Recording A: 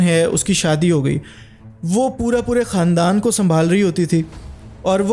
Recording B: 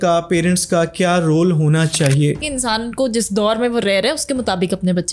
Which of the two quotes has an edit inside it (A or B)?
B